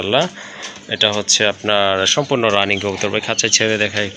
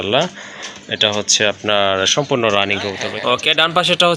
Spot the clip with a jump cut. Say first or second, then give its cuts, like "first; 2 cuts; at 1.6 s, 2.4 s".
second; 1 cut; at 3.1 s